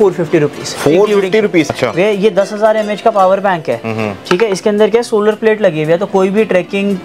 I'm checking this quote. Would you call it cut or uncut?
cut